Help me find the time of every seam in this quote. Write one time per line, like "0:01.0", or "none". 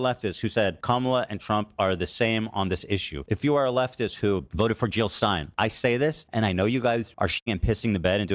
0:00.8
0:03.1
0:04.5
0:05.5
0:06.2
0:07.3